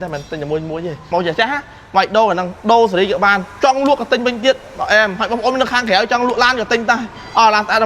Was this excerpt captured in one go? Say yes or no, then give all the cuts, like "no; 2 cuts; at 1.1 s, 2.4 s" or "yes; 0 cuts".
no; 1 cut; at 1.1 s